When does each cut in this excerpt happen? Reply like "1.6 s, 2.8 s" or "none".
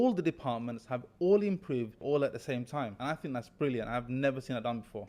2.0 s, 3.0 s